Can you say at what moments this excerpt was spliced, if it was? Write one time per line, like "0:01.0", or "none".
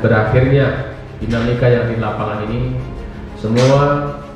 none